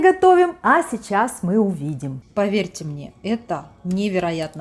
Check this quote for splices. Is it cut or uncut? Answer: cut